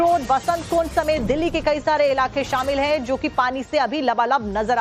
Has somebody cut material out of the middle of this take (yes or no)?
no